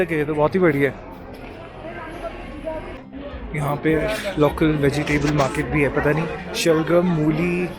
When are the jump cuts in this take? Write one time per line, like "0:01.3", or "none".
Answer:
0:03.0